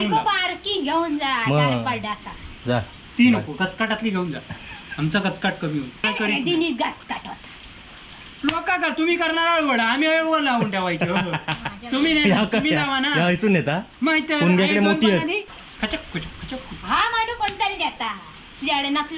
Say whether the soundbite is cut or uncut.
cut